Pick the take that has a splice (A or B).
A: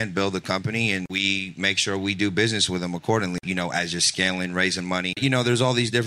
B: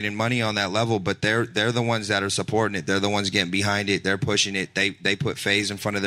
A